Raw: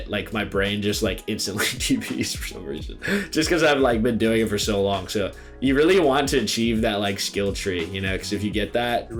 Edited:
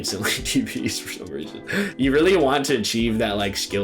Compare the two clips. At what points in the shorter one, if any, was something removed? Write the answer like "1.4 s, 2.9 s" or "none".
1.9 s

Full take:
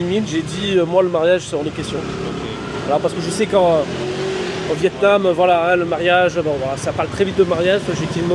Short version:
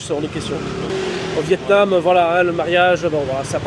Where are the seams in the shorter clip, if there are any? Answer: 0.9 s

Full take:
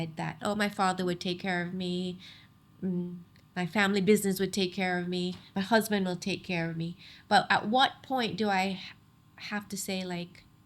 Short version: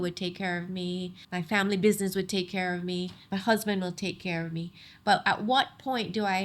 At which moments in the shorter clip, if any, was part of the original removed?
1.2 s

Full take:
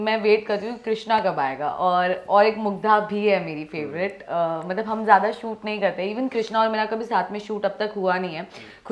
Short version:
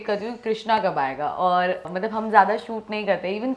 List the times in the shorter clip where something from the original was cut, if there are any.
1.8 s

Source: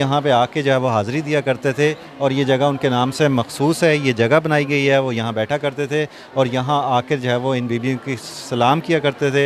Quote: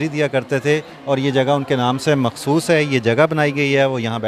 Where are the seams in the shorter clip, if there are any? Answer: none

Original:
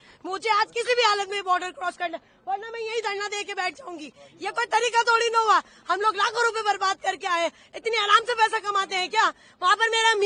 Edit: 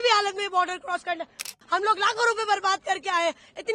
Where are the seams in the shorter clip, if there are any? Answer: 1.5 s

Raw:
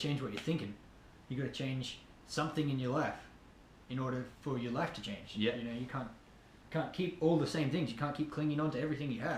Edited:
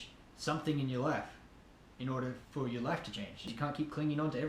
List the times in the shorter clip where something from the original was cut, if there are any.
3.5 s

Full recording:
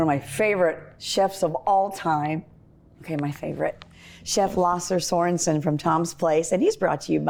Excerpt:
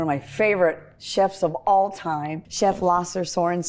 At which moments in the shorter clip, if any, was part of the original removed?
2.4 s

